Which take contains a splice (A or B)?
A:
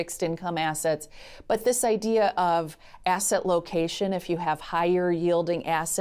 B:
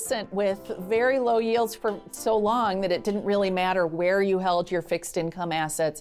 B